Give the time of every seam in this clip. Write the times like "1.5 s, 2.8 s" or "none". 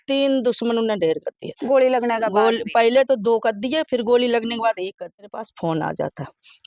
5.4 s

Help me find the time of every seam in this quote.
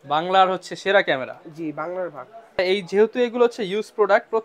2.6 s

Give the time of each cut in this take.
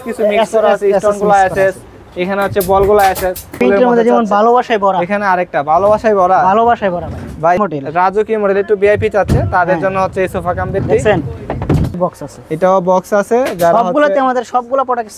3.5 s, 7.6 s, 12.0 s

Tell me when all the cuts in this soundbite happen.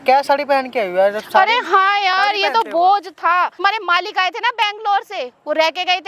3.6 s

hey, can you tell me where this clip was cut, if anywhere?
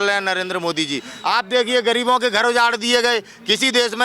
1.1 s

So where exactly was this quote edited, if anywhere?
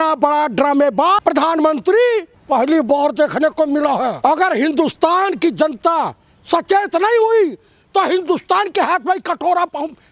1.2 s, 2.3 s, 4.2 s

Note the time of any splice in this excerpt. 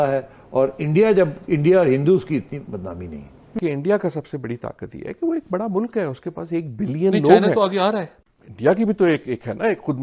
3.4 s

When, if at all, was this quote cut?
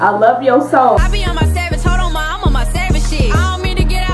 1.0 s

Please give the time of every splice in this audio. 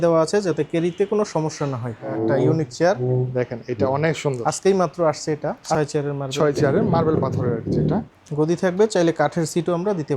2.0 s, 5.8 s, 8.2 s

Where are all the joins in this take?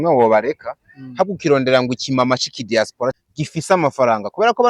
3.1 s

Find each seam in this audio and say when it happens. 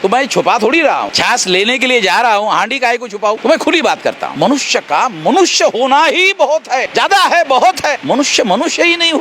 1.1 s, 3.4 s, 4.3 s, 6.9 s, 8.0 s

